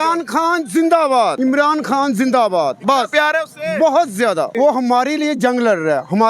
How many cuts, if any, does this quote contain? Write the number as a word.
two